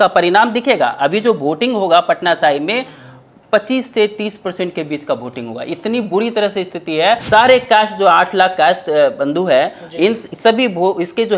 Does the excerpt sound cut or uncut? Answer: cut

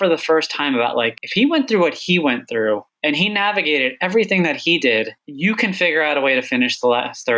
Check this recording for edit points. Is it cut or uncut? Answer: cut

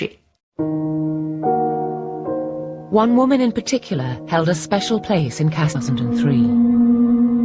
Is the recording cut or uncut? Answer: uncut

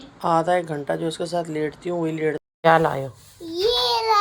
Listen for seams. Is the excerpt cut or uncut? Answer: cut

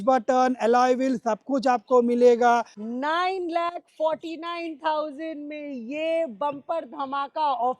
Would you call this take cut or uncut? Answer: cut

